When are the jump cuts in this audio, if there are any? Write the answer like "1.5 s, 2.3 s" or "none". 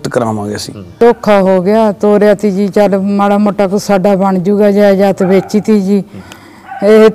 1.0 s